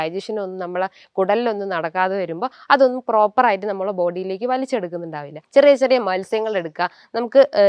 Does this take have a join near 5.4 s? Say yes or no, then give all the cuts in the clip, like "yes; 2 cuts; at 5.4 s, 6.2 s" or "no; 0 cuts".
yes; 1 cut; at 5.4 s